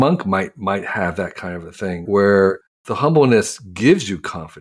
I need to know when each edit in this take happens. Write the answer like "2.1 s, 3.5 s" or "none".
2.7 s